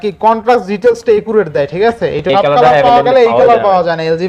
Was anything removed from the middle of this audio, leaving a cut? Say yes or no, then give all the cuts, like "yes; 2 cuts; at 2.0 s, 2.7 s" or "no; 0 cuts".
yes; 1 cut; at 2.3 s